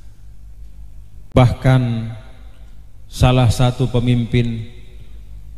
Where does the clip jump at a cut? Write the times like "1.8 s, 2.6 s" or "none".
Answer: 1.3 s